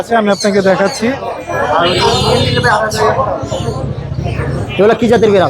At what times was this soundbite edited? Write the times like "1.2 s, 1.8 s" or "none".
1.3 s

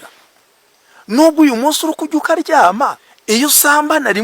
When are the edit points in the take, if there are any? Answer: 3.1 s

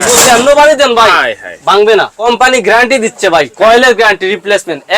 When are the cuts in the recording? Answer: 2.2 s

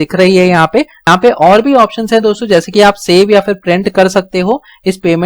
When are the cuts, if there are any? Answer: 1.0 s

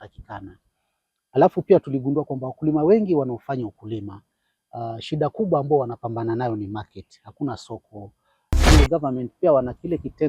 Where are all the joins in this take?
8.7 s

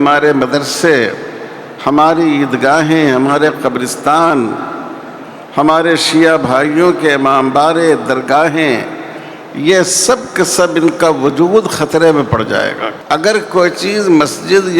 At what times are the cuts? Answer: 12.9 s

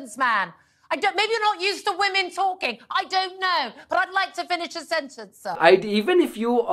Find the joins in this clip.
5.6 s

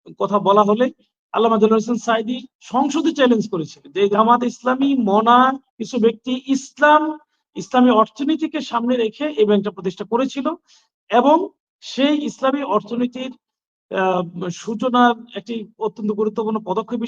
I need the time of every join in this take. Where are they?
4.1 s

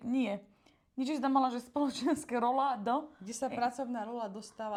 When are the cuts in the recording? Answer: none

